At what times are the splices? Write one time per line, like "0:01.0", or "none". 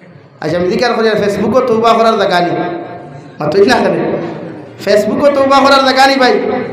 none